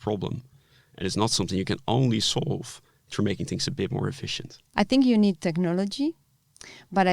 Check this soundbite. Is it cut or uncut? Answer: cut